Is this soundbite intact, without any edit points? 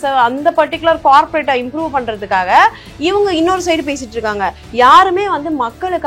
yes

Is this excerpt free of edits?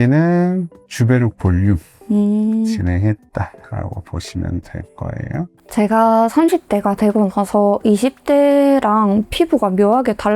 no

